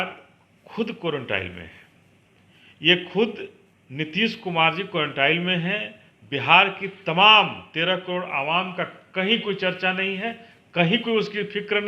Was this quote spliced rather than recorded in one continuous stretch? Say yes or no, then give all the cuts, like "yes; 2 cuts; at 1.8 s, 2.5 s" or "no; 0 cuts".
no; 0 cuts